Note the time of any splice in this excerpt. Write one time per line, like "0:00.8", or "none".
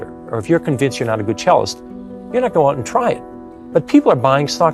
none